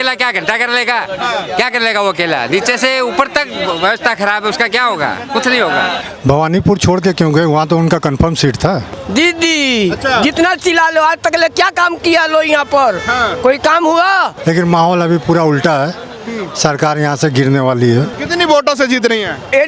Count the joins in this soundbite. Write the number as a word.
four